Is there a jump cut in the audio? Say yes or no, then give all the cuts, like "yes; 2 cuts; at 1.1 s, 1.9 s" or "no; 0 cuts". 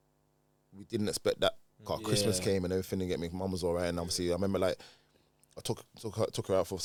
no; 0 cuts